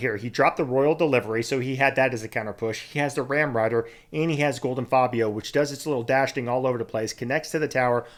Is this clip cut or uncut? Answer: uncut